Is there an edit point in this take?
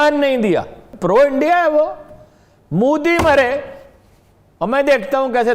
yes; 1 cut; at 0.9 s

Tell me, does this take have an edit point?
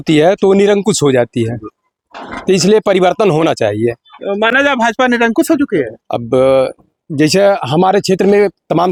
no; 0 cuts

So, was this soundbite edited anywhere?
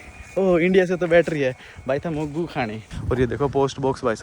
yes; 1 cut; at 2.9 s

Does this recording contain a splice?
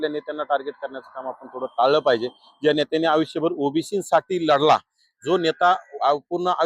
no; 0 cuts

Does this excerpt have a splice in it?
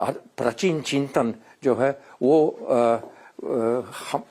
no; 0 cuts

